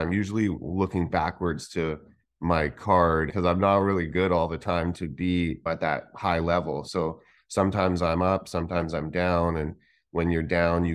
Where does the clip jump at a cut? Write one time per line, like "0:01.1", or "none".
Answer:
0:03.3